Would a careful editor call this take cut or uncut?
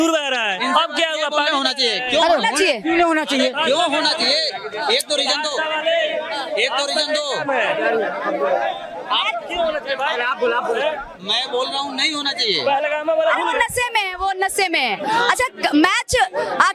uncut